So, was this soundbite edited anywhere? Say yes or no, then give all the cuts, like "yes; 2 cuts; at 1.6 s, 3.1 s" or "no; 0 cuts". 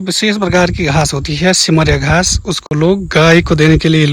no; 0 cuts